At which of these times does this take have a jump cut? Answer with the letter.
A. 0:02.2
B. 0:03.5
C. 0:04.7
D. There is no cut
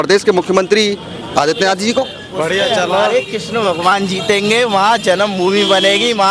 A